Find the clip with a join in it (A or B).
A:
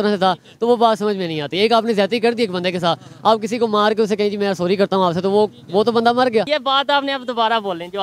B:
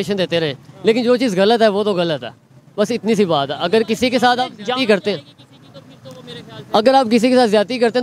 A